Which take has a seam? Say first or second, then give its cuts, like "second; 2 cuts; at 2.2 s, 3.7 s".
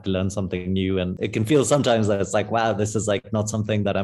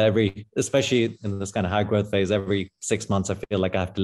first; 1 cut; at 1.2 s